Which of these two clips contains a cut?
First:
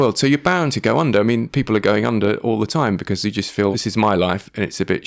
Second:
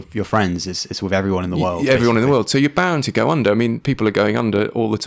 first; 1 cut; at 3.7 s

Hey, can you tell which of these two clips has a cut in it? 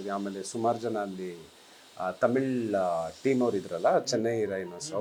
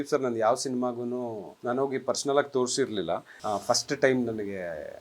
second; 2 cuts; at 1.5 s, 3.3 s

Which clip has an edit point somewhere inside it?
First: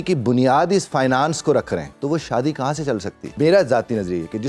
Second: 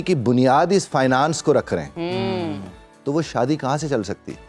first; 2 cuts; at 1.9 s, 3.3 s

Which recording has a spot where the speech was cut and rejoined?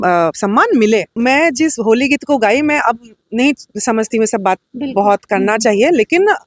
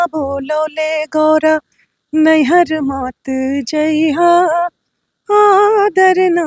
first; 1 cut; at 1.2 s

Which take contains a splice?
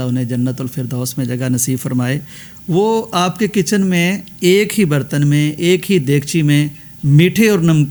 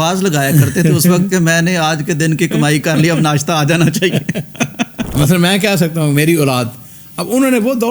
second; 1 cut; at 5.0 s

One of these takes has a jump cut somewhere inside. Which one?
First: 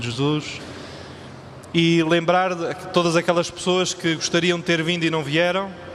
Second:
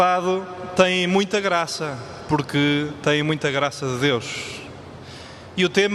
first; 1 cut; at 3.8 s

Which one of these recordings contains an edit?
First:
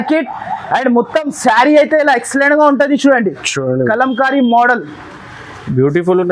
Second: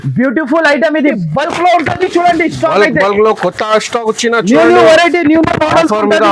second; 1 cut; at 1.2 s

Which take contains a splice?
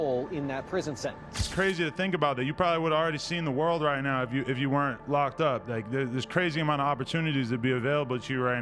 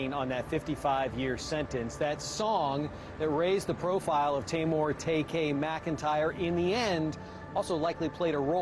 first; 1 cut; at 1.4 s

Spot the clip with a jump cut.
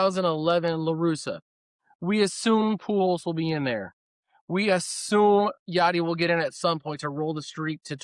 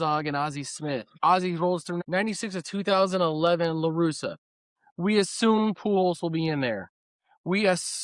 second; 2 cuts; at 1.1 s, 2.0 s

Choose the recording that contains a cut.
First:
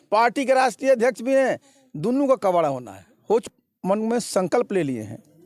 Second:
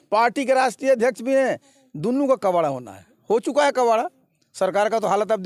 first; 1 cut; at 3.5 s

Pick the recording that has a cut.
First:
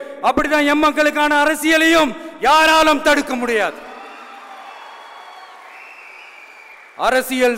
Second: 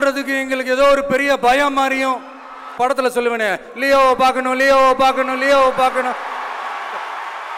second; 1 cut; at 2.8 s

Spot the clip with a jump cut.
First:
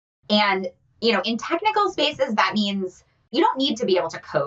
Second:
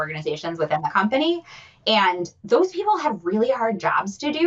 first; 1 cut; at 3.3 s

